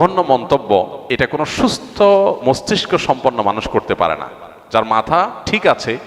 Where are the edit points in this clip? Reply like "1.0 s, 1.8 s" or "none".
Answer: 1.0 s